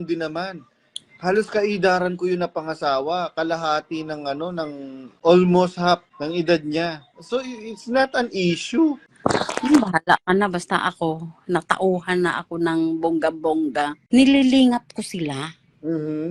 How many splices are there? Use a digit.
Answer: 4